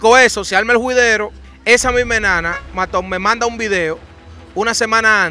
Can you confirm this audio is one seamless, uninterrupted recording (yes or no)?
no